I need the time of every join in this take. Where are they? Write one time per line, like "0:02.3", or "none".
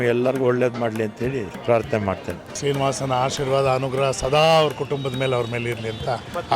0:01.5
0:02.6